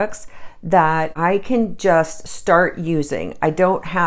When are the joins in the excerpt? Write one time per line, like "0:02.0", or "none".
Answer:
0:01.1